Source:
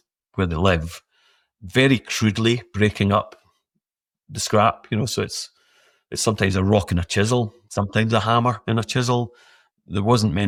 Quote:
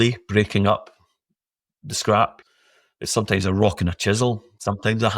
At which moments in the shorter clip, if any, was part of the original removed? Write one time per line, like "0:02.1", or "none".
0:02.4